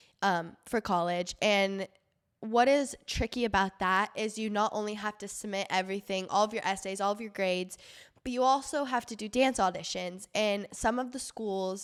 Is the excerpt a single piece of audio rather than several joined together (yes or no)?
yes